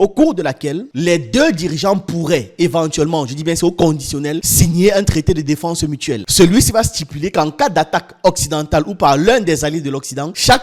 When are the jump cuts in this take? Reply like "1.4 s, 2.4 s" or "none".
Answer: 0.9 s